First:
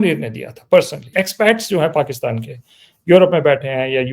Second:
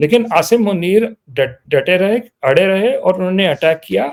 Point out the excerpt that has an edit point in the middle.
first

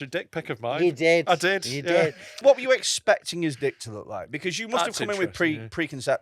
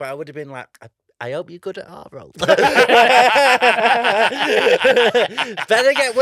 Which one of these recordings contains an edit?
first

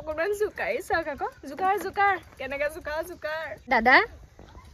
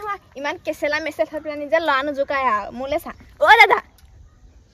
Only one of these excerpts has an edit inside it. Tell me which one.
first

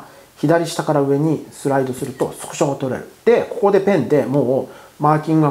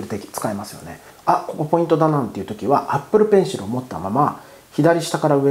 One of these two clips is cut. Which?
second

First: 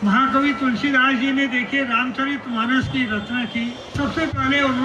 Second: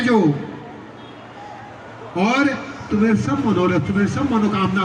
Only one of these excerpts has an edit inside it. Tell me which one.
first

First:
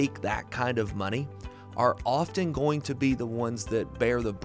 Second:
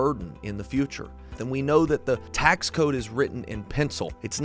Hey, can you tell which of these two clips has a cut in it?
second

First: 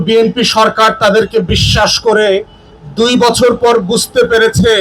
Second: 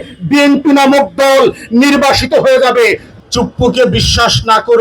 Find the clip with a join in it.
second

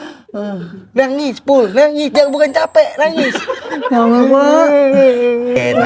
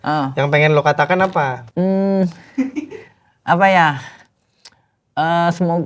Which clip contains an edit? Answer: second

